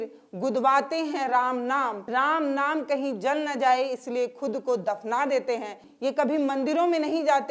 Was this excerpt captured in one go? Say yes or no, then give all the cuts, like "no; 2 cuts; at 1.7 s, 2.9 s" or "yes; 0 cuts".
no; 2 cuts; at 2.0 s, 5.9 s